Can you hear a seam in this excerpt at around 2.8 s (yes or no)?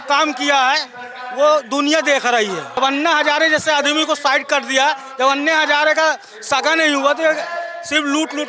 yes